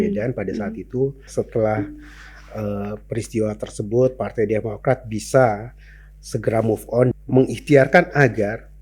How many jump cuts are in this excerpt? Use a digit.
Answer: 2